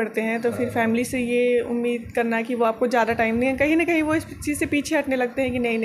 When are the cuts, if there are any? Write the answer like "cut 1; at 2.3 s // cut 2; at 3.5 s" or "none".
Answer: none

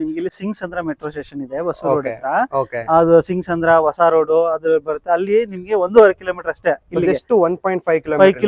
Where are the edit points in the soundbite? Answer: none

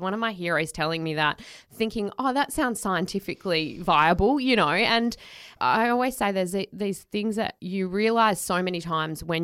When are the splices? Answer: cut 1; at 5.5 s // cut 2; at 7.6 s

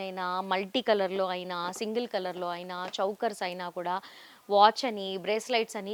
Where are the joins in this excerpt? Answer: none

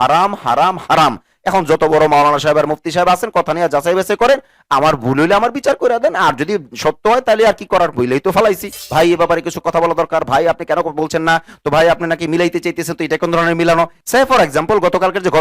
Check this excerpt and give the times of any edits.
cut 1; at 8.8 s // cut 2; at 14.0 s

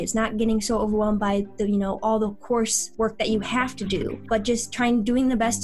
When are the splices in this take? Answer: cut 1; at 2.8 s // cut 2; at 4.2 s

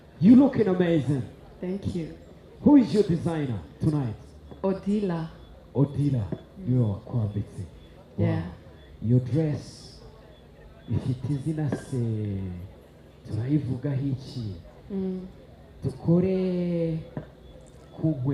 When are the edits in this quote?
none

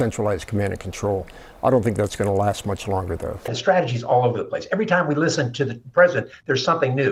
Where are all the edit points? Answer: none

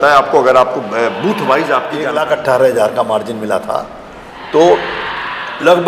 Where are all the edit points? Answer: cut 1; at 2.0 s

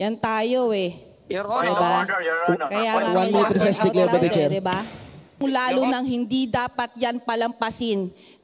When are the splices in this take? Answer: cut 1; at 5.4 s

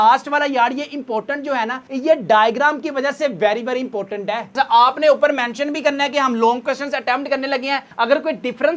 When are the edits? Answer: cut 1; at 4.4 s

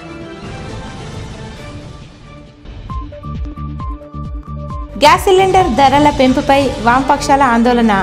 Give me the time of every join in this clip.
cut 1; at 2.0 s

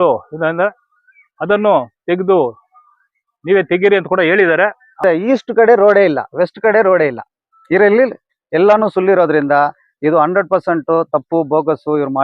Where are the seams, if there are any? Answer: cut 1; at 5.0 s

